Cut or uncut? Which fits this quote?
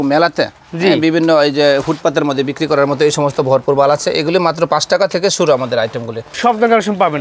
cut